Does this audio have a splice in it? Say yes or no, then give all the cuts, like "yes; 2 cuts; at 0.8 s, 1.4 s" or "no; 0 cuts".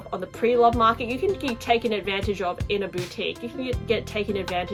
no; 0 cuts